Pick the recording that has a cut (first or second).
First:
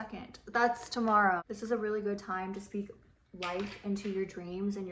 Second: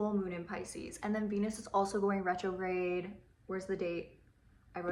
first